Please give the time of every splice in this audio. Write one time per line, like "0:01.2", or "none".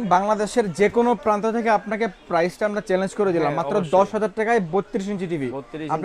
none